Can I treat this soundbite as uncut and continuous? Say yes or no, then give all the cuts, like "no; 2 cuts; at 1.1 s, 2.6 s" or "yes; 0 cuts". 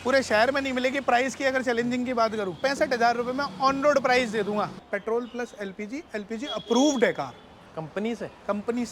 no; 2 cuts; at 2.6 s, 4.8 s